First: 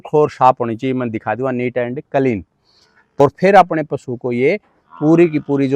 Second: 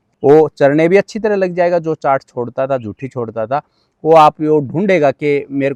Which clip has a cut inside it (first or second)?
first